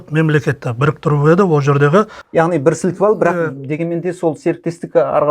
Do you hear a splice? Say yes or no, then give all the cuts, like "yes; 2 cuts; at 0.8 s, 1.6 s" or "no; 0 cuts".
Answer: yes; 1 cut; at 2.2 s